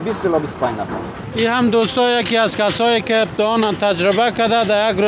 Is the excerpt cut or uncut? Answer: cut